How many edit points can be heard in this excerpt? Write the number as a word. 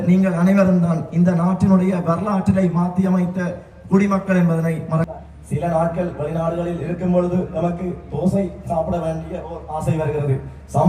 one